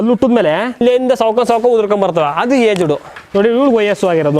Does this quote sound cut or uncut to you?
cut